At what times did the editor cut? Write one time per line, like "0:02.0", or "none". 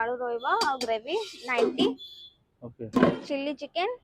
0:03.0